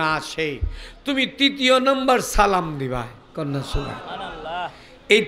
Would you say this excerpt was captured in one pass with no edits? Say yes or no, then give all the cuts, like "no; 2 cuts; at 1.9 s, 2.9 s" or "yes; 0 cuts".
yes; 0 cuts